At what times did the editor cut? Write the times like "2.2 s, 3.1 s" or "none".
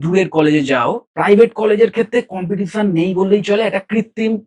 1.0 s